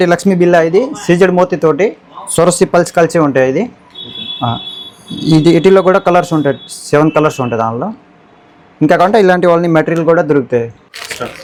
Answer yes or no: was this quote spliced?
no